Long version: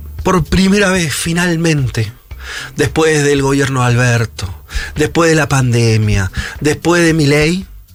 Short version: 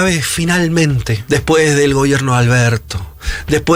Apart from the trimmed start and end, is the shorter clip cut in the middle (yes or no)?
yes